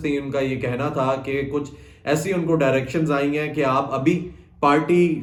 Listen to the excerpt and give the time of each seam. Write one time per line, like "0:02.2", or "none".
none

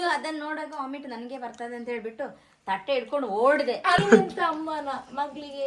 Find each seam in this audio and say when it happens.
0:04.0

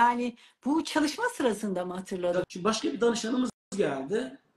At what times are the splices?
0:02.5

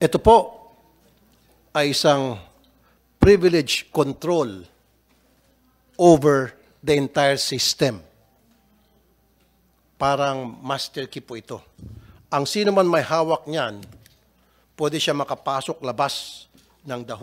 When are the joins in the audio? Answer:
none

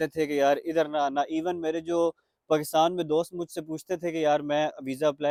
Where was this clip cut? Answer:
none

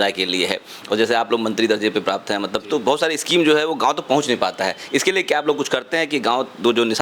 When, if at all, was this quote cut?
none

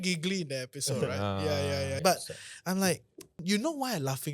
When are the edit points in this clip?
0:02.0
0:03.4

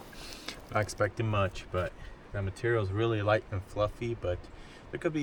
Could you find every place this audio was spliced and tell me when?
none

